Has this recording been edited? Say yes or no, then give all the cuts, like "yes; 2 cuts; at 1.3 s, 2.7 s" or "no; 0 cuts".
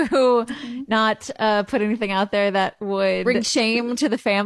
yes; 1 cut; at 3.2 s